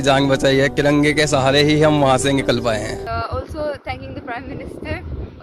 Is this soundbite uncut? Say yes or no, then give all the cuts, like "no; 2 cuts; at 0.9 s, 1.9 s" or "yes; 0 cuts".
no; 1 cut; at 3.0 s